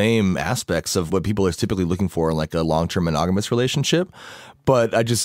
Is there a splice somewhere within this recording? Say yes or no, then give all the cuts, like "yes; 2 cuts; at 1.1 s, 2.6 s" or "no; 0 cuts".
yes; 1 cut; at 1.1 s